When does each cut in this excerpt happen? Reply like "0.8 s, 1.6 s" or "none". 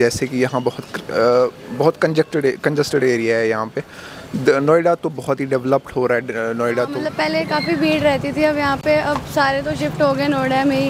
7.1 s